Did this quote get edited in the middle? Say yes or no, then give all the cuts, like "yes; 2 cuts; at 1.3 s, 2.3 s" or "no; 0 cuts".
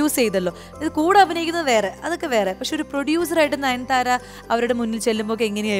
no; 0 cuts